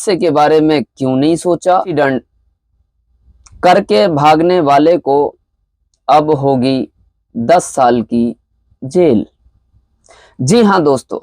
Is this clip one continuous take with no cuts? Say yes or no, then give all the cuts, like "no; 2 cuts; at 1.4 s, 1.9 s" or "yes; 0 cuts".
no; 1 cut; at 1.9 s